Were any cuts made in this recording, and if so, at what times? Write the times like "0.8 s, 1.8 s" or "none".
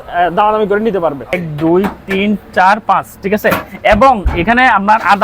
1.5 s